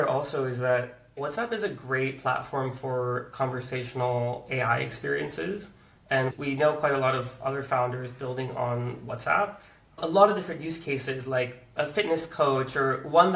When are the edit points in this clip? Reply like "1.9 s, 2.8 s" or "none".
1.1 s